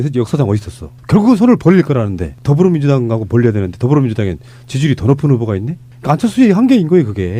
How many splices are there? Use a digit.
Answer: 0